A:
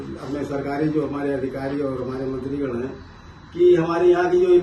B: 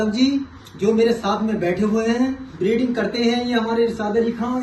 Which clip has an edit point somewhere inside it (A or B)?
B